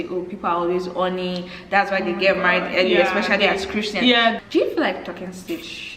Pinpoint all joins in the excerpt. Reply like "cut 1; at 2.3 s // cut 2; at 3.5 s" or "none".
cut 1; at 4.4 s